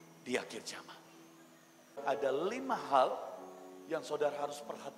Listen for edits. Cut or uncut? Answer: cut